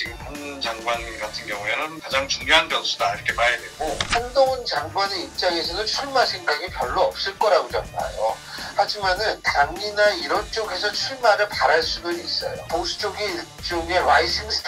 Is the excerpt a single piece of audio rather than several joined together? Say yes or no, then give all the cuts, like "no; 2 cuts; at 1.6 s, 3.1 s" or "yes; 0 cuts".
yes; 0 cuts